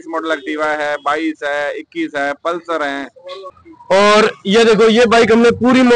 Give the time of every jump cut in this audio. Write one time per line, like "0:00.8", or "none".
0:03.5